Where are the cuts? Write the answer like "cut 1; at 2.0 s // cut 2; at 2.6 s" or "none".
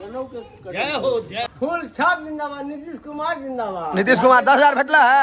cut 1; at 1.4 s